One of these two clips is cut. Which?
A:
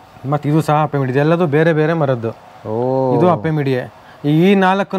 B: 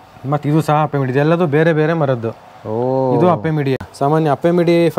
B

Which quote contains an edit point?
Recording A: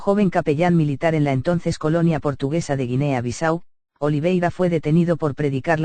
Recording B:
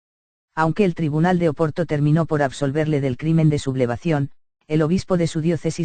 B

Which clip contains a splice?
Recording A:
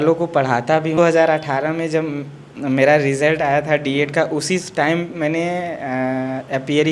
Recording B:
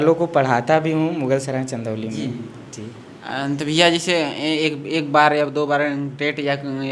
A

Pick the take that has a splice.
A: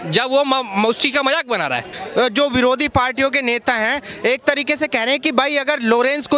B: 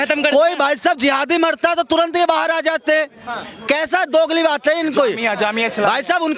A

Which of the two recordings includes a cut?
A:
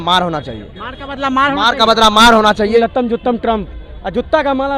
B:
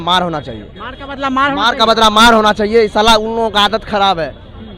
A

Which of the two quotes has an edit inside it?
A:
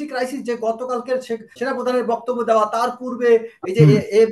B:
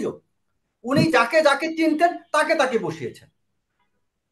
A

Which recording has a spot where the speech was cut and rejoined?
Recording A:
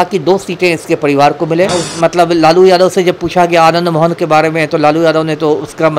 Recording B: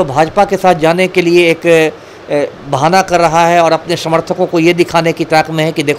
A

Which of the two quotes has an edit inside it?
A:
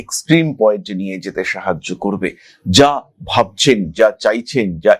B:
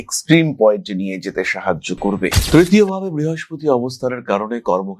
B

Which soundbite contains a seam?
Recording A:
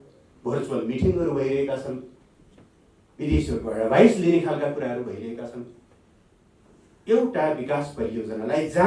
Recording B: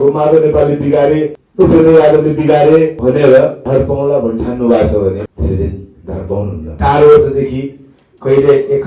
B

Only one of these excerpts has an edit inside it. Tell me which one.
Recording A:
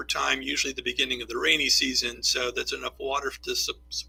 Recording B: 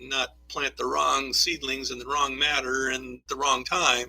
B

